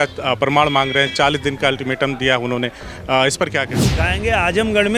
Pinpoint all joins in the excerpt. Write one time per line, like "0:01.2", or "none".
0:04.1